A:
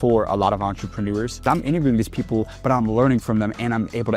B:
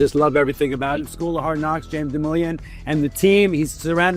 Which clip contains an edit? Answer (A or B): A